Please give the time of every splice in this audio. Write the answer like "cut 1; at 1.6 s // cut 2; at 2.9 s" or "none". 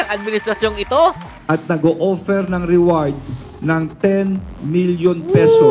none